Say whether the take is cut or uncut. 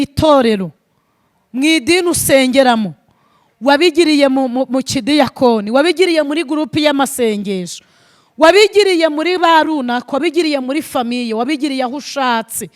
uncut